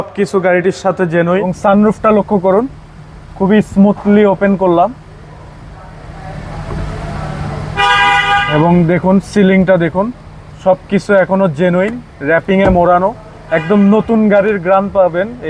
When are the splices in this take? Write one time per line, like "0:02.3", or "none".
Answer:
0:01.5

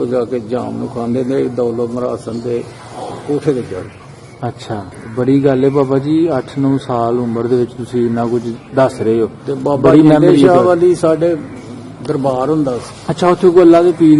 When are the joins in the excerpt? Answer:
none

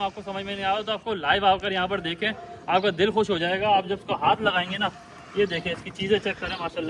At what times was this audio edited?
none

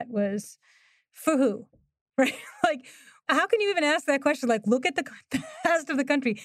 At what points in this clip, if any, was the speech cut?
0:03.2

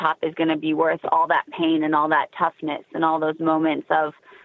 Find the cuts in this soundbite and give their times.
none

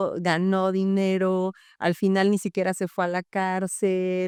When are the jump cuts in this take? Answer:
none

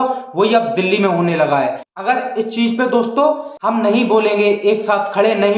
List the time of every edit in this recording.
0:03.5

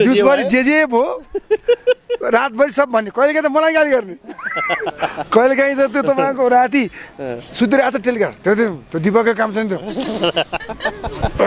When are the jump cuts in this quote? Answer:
none

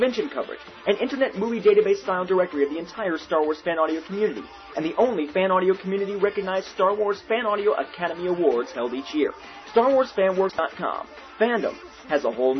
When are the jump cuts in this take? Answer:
0:10.6

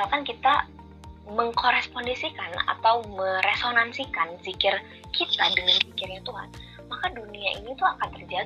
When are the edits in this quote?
none

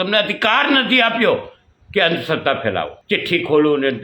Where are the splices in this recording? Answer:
0:02.9

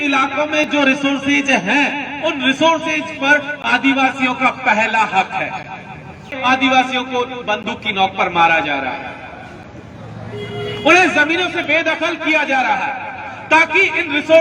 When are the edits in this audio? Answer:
0:06.3

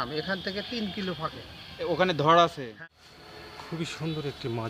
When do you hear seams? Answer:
0:02.7

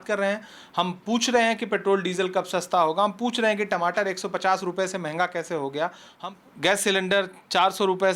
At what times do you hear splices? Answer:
0:06.1

